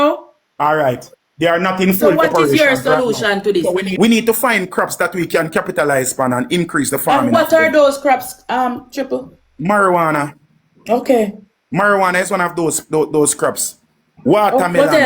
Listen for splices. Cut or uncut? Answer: cut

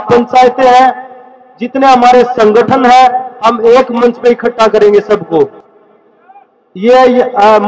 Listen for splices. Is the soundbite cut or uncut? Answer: uncut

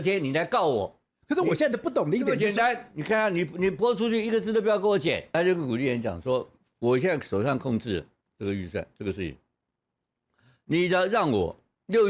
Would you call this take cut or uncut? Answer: cut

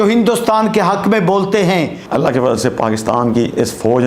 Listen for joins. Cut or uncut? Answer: cut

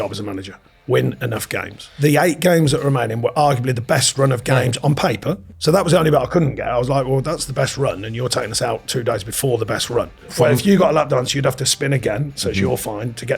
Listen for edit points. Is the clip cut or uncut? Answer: cut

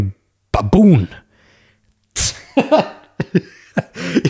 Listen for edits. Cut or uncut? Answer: uncut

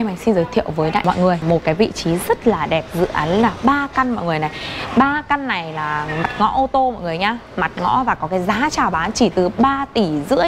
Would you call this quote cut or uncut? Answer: cut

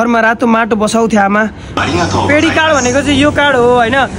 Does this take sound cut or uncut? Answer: cut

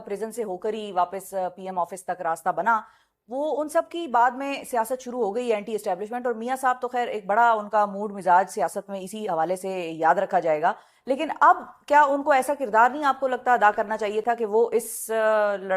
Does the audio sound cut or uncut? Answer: uncut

